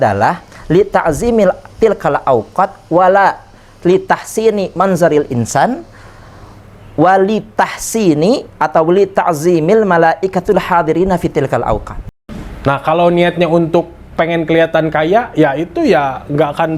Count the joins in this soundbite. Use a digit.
1